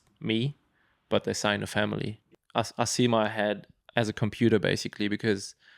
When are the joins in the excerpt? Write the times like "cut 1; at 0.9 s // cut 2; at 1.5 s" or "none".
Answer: cut 1; at 2.2 s // cut 2; at 3.7 s